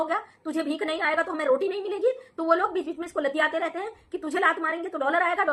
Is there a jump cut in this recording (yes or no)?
no